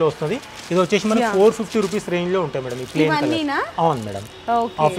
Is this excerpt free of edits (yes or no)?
yes